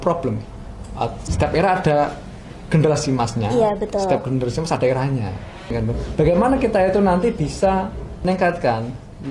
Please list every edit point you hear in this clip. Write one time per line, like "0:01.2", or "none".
0:01.2
0:05.7
0:08.2